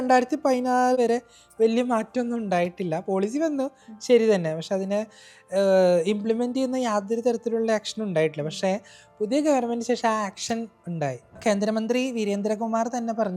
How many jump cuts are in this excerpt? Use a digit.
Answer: 2